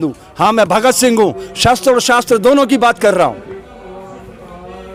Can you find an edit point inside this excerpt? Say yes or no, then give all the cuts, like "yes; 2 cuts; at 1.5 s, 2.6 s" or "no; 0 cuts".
no; 0 cuts